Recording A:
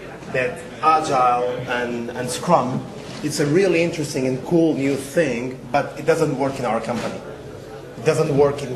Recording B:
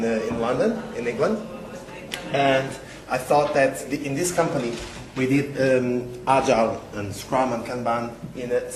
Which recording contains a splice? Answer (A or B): A